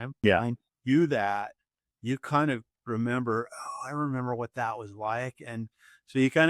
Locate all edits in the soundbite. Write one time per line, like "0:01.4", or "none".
none